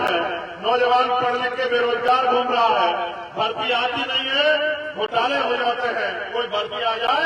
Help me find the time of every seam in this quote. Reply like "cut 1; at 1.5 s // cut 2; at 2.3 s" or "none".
none